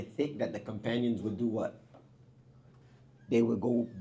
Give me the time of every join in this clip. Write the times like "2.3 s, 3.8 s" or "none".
none